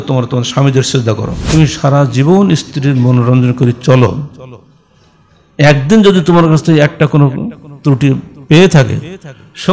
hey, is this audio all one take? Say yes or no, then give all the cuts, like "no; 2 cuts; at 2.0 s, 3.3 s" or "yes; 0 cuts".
no; 1 cut; at 1.3 s